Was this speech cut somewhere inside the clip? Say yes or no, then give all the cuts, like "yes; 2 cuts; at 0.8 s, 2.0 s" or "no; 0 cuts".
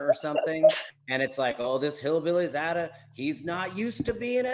no; 0 cuts